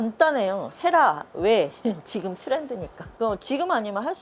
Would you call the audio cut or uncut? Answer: cut